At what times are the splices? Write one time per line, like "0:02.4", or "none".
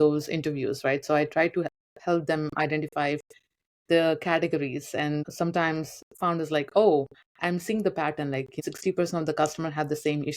0:05.3
0:08.6